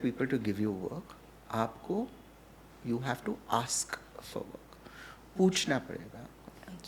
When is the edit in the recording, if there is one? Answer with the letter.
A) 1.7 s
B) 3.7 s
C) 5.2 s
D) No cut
D